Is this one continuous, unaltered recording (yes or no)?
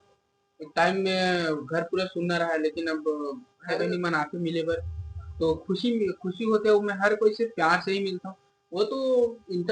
yes